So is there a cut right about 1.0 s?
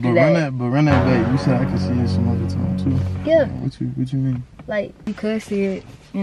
no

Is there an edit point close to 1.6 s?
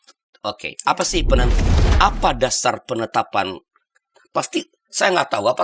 yes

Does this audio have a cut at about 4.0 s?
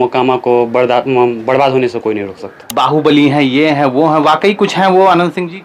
no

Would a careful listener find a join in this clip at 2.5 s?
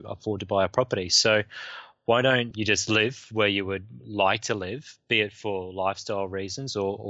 yes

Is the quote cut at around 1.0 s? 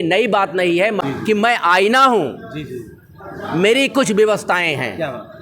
yes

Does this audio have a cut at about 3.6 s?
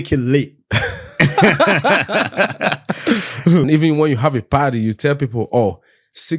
yes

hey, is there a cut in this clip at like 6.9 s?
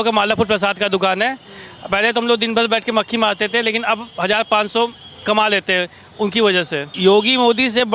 yes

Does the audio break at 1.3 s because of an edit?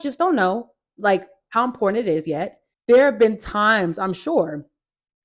no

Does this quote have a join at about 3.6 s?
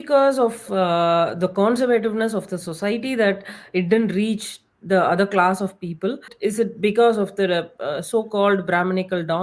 no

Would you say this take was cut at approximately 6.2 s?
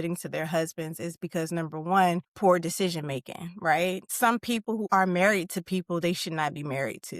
no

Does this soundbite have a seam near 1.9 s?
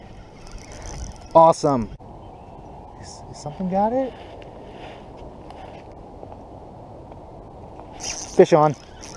yes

